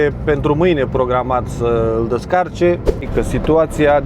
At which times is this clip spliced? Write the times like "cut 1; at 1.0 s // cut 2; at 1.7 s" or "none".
cut 1; at 3.1 s

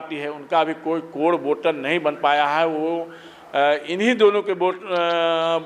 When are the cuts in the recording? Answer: none

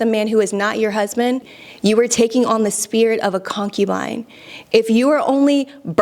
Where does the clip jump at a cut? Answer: cut 1; at 1.6 s

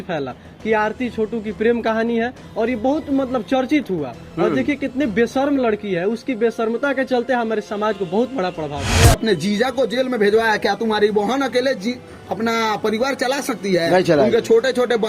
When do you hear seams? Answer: cut 1; at 8.9 s

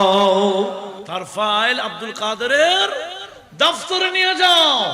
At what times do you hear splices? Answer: cut 1; at 1.0 s

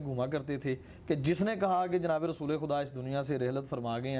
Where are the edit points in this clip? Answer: none

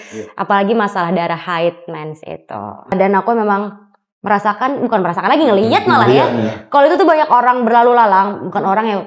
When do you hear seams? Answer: cut 1; at 2.9 s

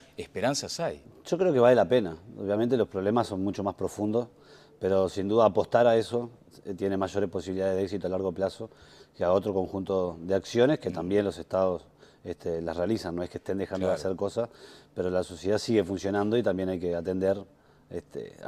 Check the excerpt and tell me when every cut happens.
none

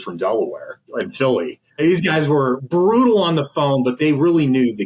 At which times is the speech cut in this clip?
cut 1; at 0.8 s // cut 2; at 1.8 s // cut 3; at 2.6 s // cut 4; at 4.0 s

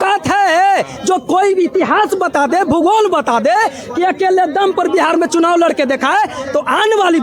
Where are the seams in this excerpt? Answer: none

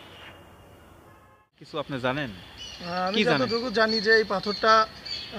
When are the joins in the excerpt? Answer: cut 1; at 1.6 s

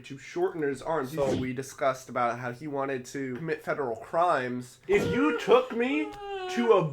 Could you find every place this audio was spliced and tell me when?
cut 1; at 1.3 s // cut 2; at 3.4 s // cut 3; at 4.7 s

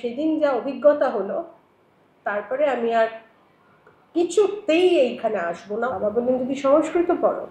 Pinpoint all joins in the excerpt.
cut 1; at 5.9 s

